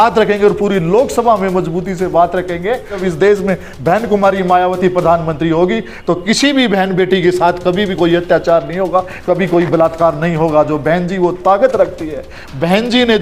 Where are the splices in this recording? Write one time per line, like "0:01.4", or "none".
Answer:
0:03.0

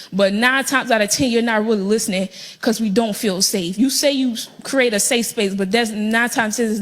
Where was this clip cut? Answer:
0:03.2

